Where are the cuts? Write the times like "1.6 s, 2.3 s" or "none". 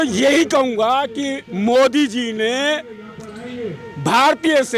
none